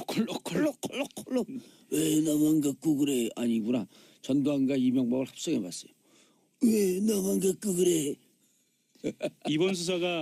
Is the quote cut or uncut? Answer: uncut